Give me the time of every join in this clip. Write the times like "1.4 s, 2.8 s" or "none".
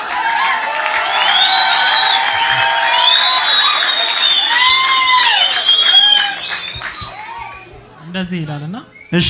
none